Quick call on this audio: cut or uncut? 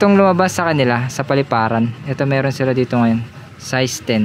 uncut